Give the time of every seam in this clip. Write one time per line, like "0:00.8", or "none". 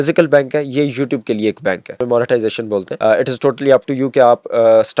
0:02.0
0:02.9